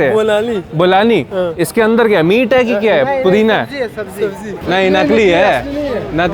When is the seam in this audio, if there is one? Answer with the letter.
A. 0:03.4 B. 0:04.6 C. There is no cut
B